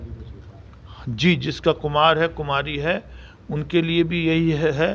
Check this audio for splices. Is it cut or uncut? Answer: uncut